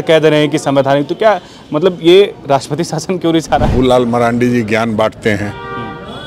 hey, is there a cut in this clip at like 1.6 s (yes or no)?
no